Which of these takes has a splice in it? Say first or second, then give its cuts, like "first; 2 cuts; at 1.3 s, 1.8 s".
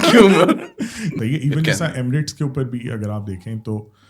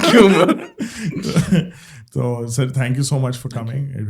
first; 1 cut; at 1.2 s